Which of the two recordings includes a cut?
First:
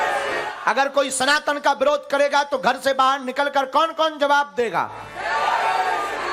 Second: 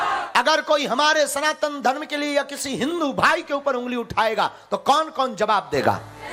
first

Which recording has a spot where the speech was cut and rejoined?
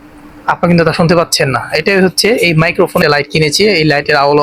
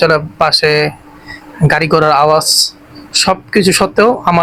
first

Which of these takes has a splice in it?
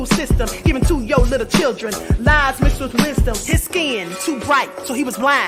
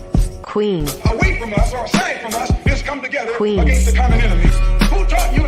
second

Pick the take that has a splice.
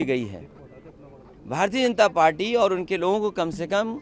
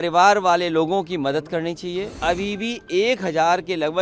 second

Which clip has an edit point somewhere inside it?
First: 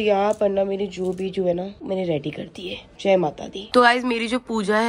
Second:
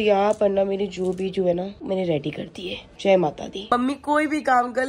second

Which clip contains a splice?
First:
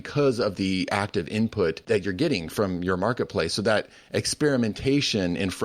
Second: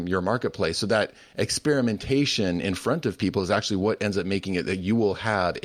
first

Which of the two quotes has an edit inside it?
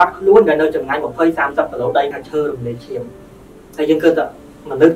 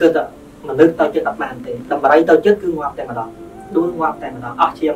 first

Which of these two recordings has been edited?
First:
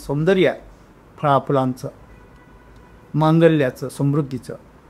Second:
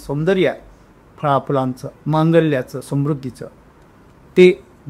second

